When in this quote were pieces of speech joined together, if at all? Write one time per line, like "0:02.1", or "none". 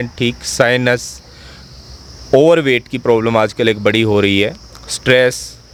none